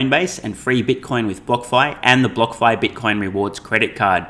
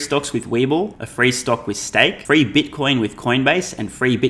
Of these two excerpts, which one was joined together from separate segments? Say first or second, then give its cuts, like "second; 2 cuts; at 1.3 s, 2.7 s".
second; 2 cuts; at 1.0 s, 2.2 s